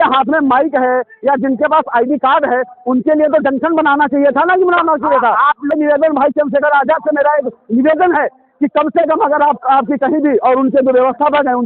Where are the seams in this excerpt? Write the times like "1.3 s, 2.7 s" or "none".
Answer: 5.7 s